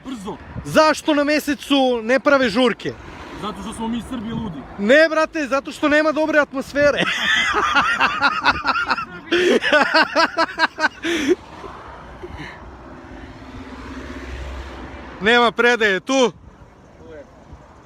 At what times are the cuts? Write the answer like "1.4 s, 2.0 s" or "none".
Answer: none